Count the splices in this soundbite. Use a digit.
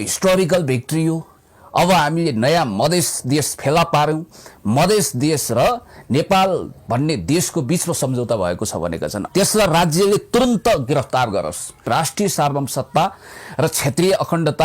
2